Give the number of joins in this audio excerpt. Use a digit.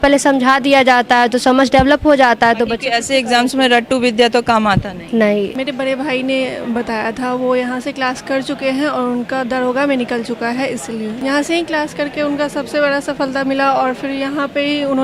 2